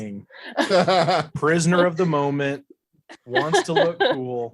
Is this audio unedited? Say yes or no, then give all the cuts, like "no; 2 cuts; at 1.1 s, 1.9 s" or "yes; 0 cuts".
yes; 0 cuts